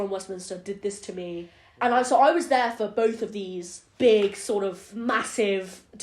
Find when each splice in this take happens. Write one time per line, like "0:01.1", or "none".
0:01.6
0:04.9